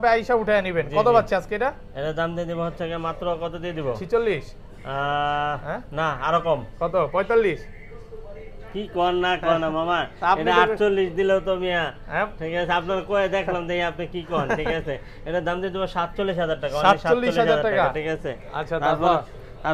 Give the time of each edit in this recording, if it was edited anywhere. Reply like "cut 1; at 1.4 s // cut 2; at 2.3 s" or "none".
none

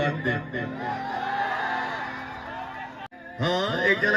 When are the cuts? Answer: cut 1; at 3.1 s

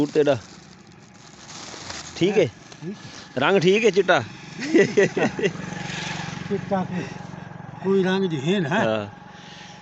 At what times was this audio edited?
none

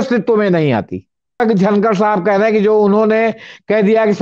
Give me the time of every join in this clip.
cut 1; at 1.4 s

